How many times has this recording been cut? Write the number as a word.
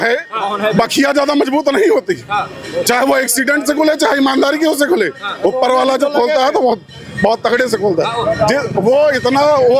zero